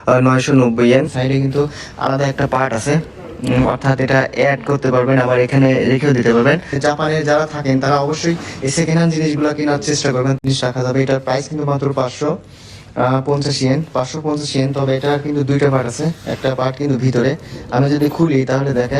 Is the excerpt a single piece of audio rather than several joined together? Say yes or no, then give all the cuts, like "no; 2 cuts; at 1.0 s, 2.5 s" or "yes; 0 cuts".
no; 3 cuts; at 1.1 s, 6.8 s, 10.4 s